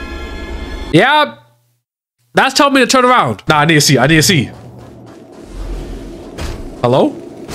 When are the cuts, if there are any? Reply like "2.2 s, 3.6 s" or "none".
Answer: none